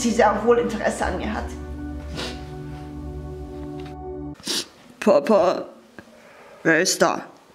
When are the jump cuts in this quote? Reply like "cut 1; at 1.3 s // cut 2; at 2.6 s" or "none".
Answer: cut 1; at 4.4 s